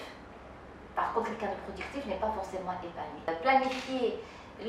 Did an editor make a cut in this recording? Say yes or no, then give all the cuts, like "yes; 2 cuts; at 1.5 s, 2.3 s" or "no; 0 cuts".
yes; 1 cut; at 3.3 s